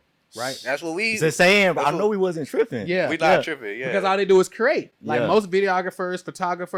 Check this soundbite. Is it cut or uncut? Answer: uncut